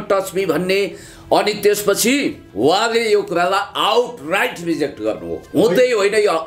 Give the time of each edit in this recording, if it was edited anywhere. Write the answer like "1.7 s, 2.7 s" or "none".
2.4 s